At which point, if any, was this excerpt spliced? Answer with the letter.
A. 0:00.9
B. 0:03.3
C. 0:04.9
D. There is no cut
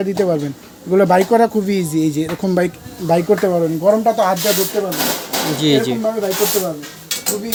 D